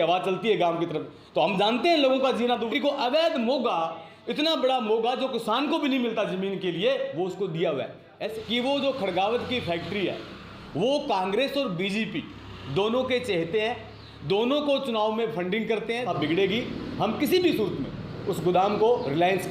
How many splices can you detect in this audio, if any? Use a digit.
3